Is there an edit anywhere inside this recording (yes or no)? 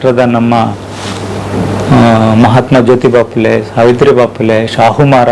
no